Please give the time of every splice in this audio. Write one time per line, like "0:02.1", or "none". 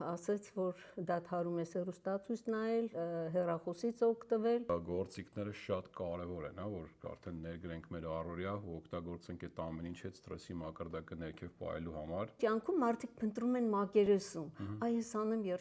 0:04.7
0:12.4